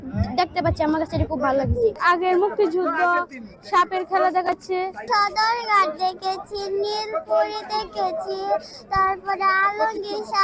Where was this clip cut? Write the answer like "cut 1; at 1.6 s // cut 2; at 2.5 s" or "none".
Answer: none